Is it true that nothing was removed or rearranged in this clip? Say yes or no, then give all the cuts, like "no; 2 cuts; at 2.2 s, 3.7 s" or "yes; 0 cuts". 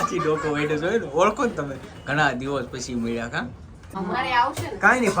no; 1 cut; at 3.8 s